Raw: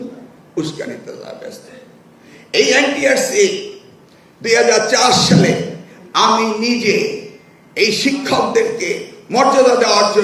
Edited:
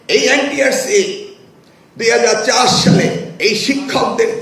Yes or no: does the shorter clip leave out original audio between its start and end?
yes